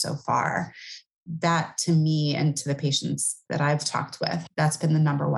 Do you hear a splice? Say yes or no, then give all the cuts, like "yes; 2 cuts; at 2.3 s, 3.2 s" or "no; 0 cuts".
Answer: yes; 1 cut; at 4.4 s